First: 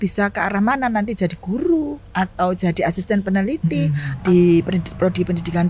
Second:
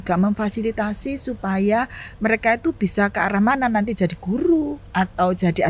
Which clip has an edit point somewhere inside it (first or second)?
first